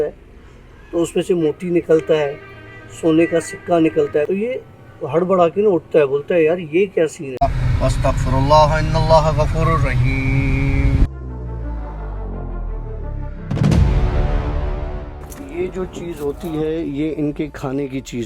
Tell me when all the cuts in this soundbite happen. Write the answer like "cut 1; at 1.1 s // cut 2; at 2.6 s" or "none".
cut 1; at 4.3 s // cut 2; at 7.2 s